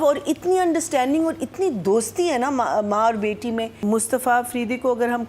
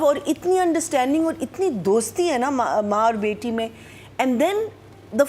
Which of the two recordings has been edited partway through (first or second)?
first